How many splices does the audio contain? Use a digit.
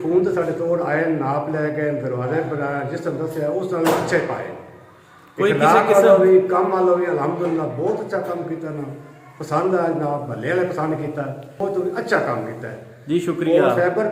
1